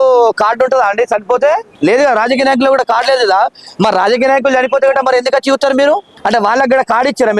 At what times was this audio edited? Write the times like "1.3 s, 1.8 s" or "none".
1.7 s, 6.1 s